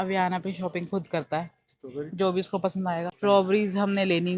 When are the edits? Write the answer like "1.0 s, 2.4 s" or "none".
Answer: 3.1 s